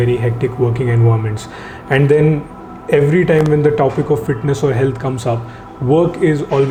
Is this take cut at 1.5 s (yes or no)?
no